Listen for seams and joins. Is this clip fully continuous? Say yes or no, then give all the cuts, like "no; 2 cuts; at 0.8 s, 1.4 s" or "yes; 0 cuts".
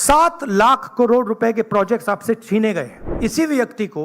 no; 1 cut; at 3.0 s